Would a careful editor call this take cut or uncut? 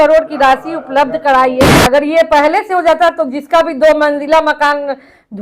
cut